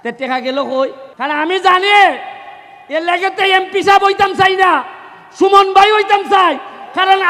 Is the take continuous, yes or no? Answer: no